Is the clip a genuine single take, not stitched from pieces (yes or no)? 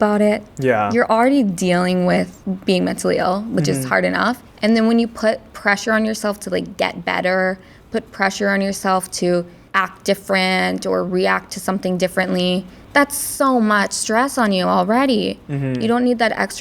no